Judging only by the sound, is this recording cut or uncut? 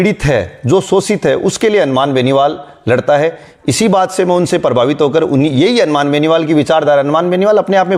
uncut